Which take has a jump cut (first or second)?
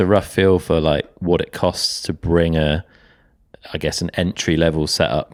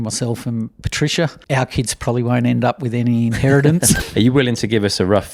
second